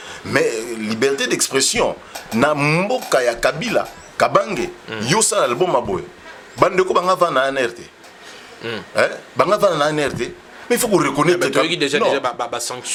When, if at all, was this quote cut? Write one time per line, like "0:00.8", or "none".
none